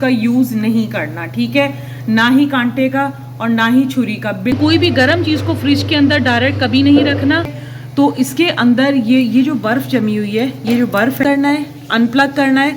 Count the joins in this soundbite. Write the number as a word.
three